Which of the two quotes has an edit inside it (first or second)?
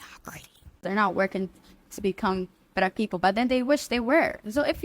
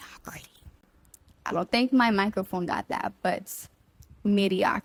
first